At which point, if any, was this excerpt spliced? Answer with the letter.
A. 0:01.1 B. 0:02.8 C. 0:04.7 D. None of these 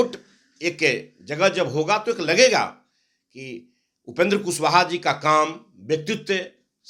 D